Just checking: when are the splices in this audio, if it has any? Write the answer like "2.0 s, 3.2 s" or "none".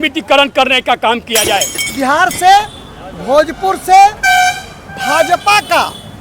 1.8 s

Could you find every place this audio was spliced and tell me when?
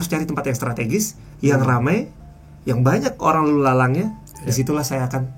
none

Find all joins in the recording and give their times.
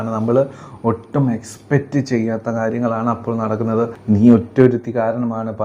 4.0 s

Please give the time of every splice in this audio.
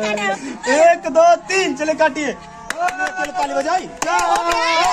3.3 s

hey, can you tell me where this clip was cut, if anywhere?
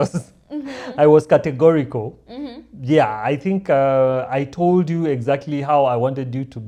none

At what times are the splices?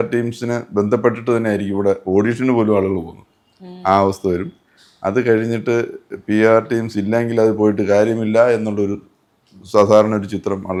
none

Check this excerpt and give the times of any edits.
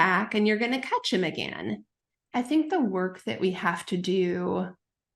2.1 s

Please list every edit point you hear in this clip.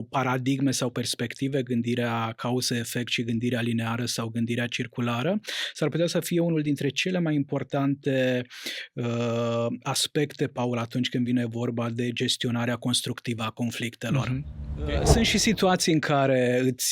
15.0 s

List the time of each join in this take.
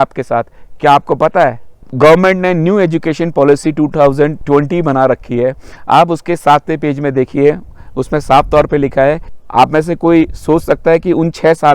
1.8 s, 4.4 s, 9.3 s

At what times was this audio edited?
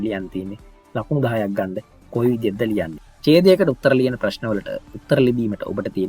3.0 s

